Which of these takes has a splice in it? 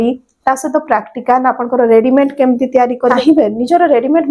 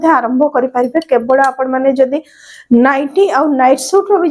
first; 1 cut; at 3.2 s

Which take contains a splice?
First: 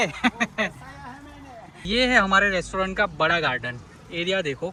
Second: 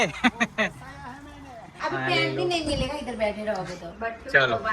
second; 1 cut; at 1.6 s

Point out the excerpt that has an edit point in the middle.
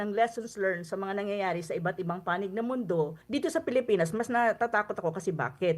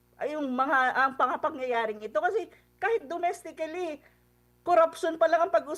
first; 1 cut; at 3.2 s

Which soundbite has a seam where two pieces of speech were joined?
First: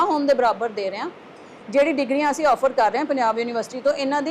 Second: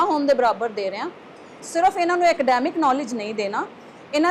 second; 1 cut; at 1.6 s

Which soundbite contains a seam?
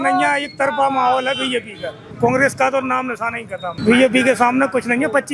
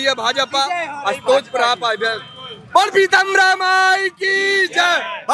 first; 2 cuts; at 2.1 s, 3.8 s

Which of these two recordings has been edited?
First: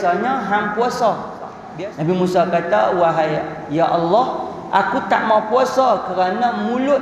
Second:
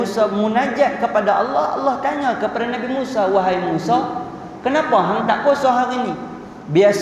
first; 1 cut; at 1.6 s

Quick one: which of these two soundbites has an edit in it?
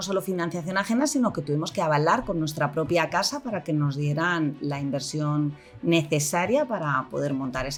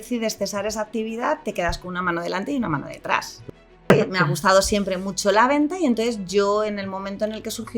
second; 1 cut; at 3.9 s

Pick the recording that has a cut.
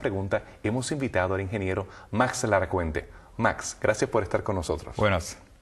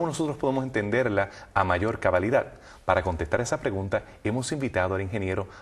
first; 1 cut; at 4.2 s

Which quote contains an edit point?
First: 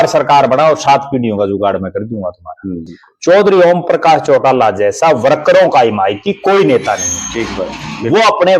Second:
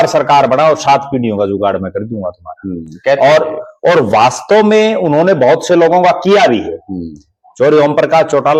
first; 1 cut; at 2.9 s

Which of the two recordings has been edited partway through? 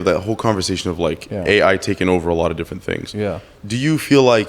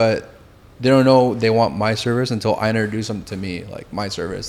first; 1 cut; at 3.5 s

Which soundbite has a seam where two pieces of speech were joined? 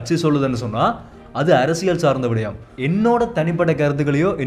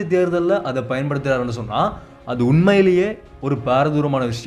first; 1 cut; at 2.7 s

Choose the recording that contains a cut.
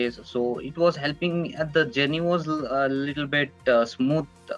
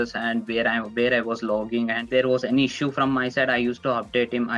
second; 1 cut; at 2.0 s

